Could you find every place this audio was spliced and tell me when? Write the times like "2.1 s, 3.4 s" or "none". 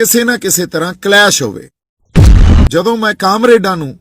2.3 s